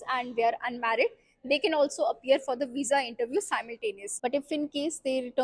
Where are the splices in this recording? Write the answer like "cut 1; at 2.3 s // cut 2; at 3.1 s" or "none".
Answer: cut 1; at 4.1 s